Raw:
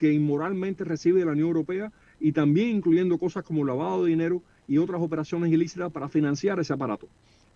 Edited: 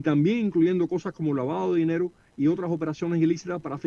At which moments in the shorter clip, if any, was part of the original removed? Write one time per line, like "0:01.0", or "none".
none